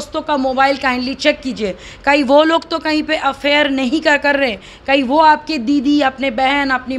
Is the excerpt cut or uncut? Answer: uncut